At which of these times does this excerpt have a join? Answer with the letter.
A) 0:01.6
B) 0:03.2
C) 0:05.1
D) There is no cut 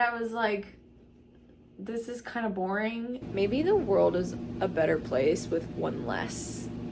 B